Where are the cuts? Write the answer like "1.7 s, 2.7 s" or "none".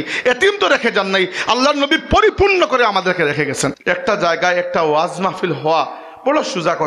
3.8 s